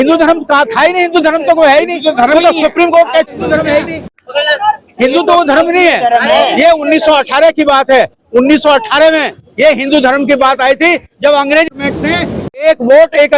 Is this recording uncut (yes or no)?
yes